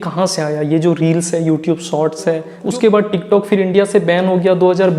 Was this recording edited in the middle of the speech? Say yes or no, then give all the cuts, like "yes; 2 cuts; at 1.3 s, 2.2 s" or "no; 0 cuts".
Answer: yes; 1 cut; at 2.6 s